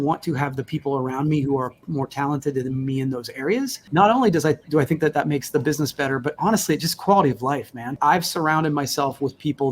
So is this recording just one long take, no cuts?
no; 2 cuts; at 3.8 s, 8.0 s

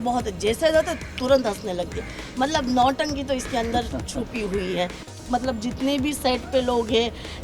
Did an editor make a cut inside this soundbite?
yes; 1 cut; at 5.1 s

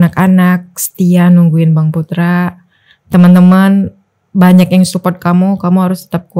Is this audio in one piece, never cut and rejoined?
yes; 0 cuts

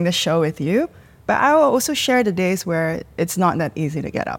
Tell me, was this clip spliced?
no; 0 cuts

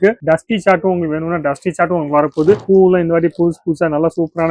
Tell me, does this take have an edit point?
yes; 1 cut; at 2.6 s

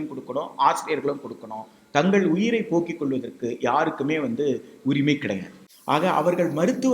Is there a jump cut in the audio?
yes; 1 cut; at 5.6 s

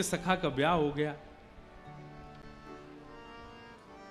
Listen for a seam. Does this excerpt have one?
no; 0 cuts

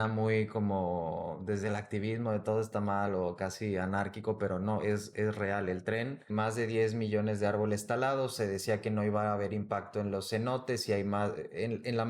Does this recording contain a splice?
yes; 1 cut; at 6.3 s

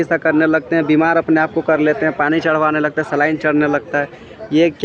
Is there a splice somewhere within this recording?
no; 0 cuts

